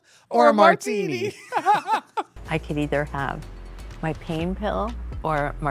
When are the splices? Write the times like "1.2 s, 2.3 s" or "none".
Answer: 2.4 s